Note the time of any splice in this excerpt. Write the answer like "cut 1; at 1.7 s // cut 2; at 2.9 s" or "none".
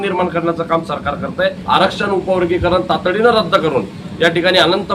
cut 1; at 1.6 s

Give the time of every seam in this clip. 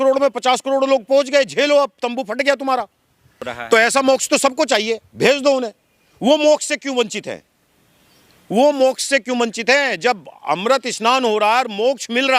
cut 1; at 3.4 s

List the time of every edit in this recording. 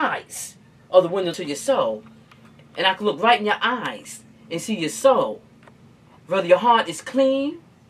cut 1; at 1.4 s

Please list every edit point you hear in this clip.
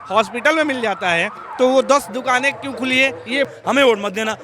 cut 1; at 3.5 s

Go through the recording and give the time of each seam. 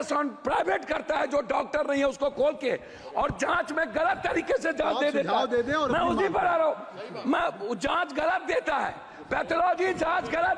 none

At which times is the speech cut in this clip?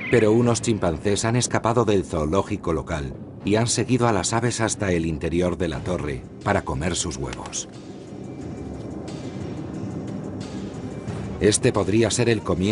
cut 1; at 2.1 s

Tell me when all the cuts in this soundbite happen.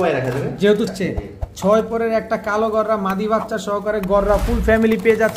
cut 1; at 0.9 s

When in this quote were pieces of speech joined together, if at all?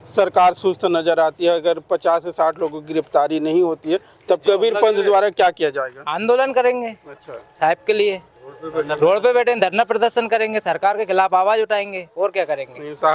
none

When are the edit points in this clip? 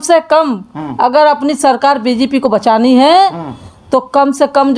none

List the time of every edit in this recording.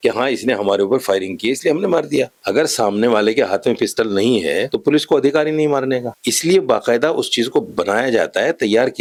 none

